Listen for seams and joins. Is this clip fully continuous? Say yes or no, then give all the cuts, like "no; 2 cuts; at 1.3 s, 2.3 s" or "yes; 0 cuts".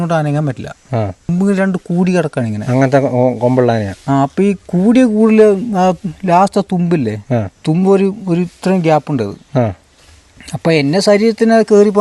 no; 1 cut; at 1.3 s